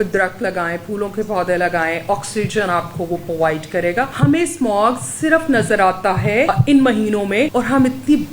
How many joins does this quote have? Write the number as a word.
three